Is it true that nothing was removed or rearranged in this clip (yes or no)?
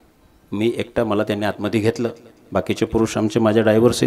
yes